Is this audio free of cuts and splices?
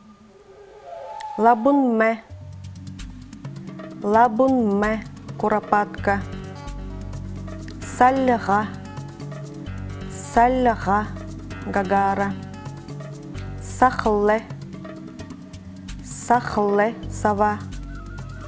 no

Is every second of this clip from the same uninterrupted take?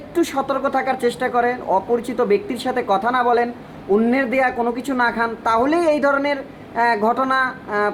yes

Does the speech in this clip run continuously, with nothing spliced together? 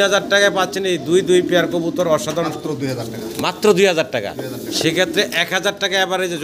no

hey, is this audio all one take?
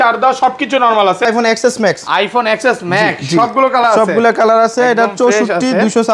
no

